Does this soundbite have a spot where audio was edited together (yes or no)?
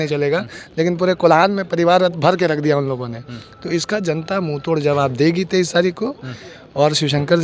no